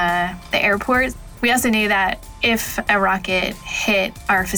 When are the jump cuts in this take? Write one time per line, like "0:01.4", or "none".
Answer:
0:01.2
0:02.3